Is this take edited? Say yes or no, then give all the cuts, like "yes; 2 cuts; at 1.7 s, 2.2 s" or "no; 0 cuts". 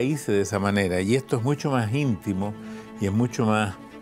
no; 0 cuts